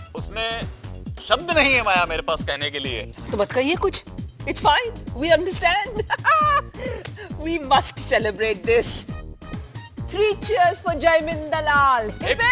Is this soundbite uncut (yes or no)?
yes